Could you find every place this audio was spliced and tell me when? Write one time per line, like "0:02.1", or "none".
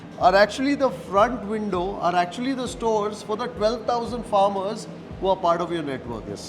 none